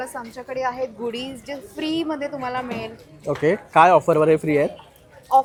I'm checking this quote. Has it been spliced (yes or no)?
no